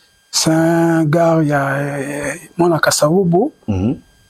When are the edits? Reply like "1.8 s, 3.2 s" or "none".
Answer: none